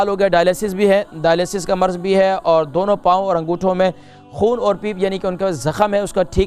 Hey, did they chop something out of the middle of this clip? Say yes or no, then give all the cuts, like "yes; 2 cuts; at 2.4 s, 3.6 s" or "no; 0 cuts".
no; 0 cuts